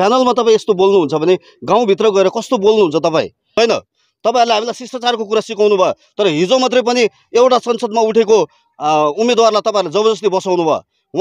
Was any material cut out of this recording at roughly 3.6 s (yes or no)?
yes